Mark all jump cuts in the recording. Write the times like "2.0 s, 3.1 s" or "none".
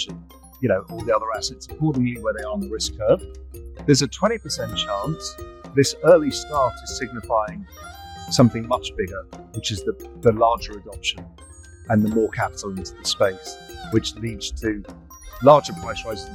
none

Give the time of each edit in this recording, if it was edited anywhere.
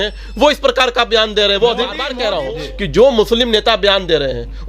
2.1 s

